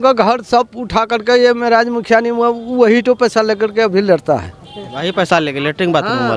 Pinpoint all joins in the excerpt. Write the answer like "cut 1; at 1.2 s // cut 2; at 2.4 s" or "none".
none